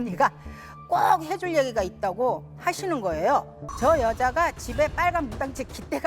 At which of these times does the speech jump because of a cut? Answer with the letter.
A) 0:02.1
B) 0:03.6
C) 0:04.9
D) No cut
B